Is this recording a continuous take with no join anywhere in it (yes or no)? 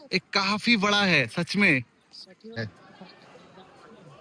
no